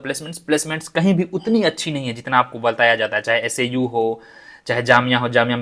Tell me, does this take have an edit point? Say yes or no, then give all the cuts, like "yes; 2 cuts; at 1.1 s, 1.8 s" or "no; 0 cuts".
no; 0 cuts